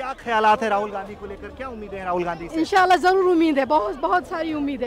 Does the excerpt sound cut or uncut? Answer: uncut